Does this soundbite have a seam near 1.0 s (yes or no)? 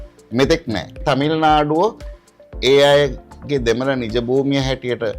yes